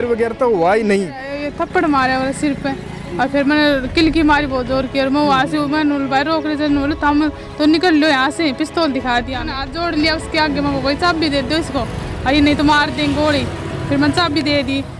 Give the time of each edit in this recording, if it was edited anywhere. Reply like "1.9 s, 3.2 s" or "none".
1.4 s, 9.7 s